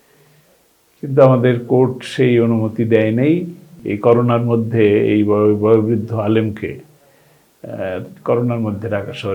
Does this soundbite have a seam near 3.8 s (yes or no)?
yes